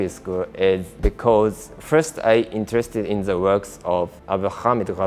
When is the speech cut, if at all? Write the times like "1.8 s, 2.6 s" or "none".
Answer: 0.9 s, 4.2 s